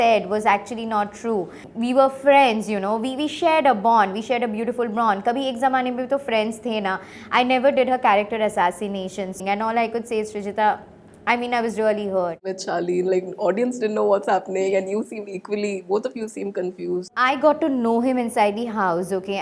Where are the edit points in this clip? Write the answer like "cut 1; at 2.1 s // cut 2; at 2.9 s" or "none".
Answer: cut 1; at 1.6 s // cut 2; at 7.1 s // cut 3; at 9.4 s // cut 4; at 12.5 s // cut 5; at 17.1 s